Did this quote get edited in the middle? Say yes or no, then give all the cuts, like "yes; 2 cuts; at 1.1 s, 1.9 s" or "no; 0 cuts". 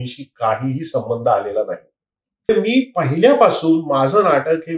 yes; 1 cut; at 2.5 s